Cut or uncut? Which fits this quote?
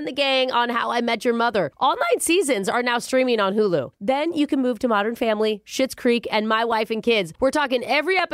uncut